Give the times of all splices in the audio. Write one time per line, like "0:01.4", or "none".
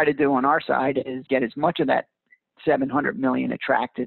0:01.2